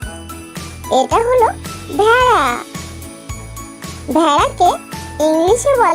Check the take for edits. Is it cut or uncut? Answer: cut